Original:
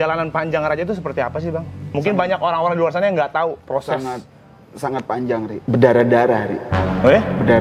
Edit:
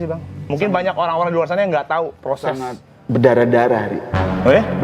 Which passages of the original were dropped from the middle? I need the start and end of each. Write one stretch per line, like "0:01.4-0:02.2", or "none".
0:04.4-0:05.6